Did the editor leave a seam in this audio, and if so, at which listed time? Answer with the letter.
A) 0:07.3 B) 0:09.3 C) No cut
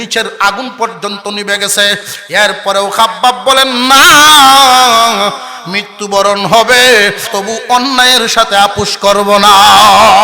A